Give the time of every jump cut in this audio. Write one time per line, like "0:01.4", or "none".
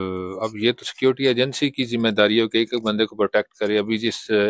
none